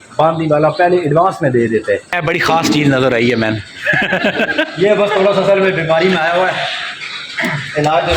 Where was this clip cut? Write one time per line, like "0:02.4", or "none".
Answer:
0:02.1